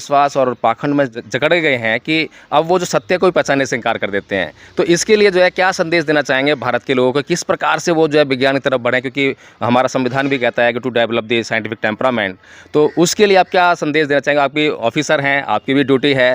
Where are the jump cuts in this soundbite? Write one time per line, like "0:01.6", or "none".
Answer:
0:01.1